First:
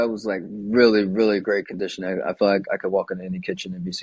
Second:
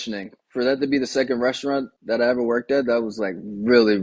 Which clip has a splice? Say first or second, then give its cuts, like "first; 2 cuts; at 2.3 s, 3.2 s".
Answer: second; 1 cut; at 1.9 s